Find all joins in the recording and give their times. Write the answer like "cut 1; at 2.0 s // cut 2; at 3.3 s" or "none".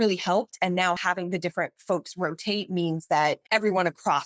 cut 1; at 1.0 s // cut 2; at 3.4 s

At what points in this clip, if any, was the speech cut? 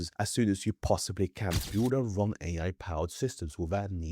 cut 1; at 1.7 s

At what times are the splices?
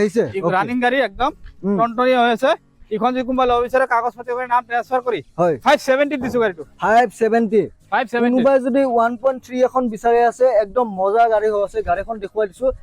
none

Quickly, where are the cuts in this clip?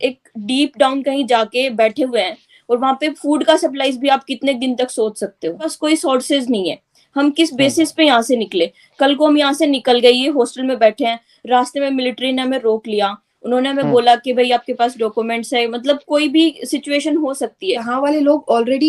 cut 1; at 5.8 s // cut 2; at 17.9 s

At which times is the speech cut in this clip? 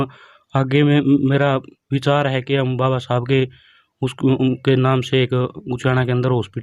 none

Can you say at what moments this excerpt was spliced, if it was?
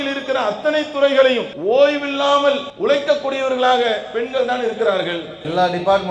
cut 1; at 1.5 s // cut 2; at 2.7 s

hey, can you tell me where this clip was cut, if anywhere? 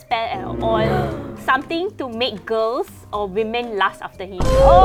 none

